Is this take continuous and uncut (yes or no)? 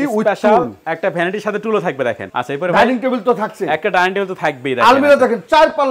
no